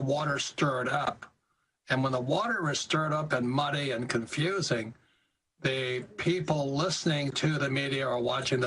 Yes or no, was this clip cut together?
yes